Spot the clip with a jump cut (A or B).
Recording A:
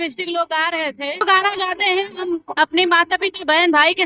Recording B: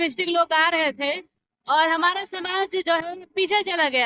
A